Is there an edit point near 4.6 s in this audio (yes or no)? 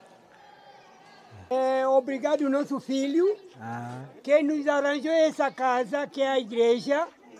no